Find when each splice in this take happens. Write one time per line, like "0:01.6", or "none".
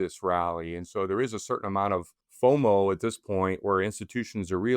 0:02.2